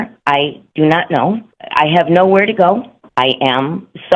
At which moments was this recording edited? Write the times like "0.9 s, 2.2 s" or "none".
1.5 s, 3.0 s